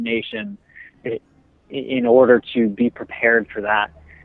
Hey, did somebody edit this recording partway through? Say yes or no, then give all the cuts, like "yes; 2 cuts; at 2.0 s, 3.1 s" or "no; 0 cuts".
yes; 1 cut; at 1.0 s